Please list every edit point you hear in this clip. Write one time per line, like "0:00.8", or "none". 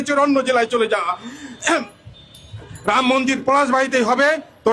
none